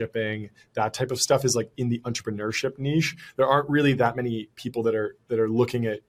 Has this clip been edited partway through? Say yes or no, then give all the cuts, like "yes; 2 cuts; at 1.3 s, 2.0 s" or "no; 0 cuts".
no; 0 cuts